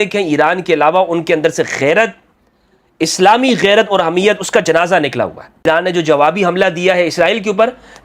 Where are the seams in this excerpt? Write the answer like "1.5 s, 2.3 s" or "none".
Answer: 5.6 s